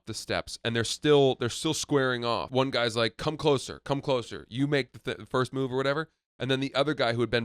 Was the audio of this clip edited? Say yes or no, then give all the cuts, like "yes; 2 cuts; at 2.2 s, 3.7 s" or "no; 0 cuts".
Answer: yes; 1 cut; at 2.5 s